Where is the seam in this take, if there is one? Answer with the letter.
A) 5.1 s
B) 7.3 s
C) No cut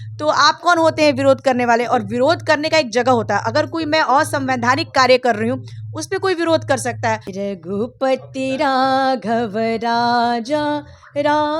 B